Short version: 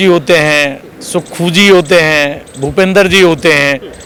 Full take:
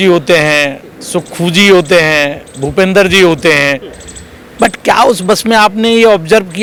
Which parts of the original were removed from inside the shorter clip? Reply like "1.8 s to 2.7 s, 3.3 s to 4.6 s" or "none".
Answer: none